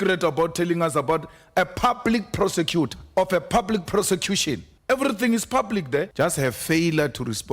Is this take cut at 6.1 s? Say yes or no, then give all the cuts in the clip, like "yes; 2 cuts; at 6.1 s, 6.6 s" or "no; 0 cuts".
yes; 3 cuts; at 3.0 s, 4.7 s, 6.1 s